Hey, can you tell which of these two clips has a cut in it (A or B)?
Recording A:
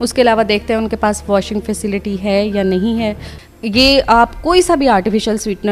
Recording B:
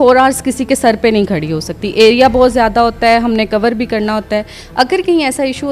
A